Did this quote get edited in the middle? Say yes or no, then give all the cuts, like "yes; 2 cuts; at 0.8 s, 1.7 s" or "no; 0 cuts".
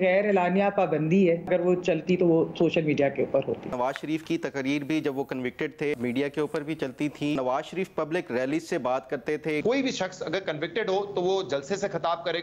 yes; 5 cuts; at 1.5 s, 3.7 s, 5.9 s, 7.4 s, 9.6 s